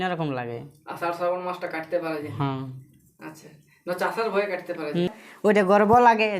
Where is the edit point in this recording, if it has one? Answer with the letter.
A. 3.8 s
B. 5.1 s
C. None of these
B